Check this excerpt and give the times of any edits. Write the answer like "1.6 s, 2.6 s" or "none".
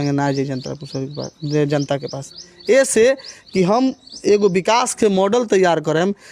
none